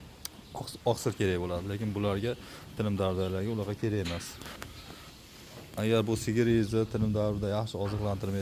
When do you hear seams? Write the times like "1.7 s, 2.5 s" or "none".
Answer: none